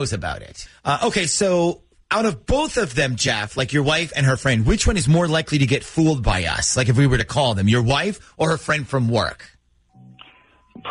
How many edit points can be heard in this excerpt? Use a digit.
0